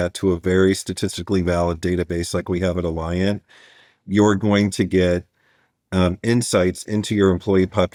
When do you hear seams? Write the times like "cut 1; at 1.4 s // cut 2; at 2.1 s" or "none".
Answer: none